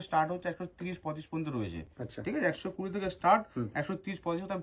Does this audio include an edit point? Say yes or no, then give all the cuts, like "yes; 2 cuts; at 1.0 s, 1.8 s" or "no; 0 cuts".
no; 0 cuts